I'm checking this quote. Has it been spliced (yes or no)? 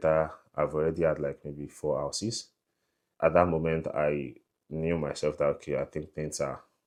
no